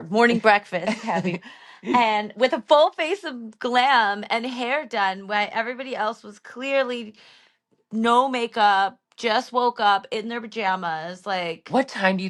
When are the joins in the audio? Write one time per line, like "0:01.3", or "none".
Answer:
none